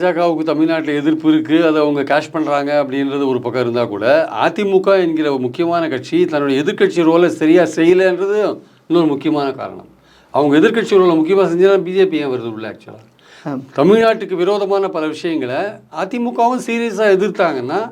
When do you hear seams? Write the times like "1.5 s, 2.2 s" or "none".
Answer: none